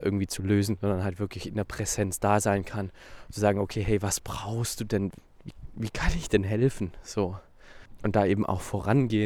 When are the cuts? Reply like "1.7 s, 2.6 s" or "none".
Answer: 5.2 s, 7.9 s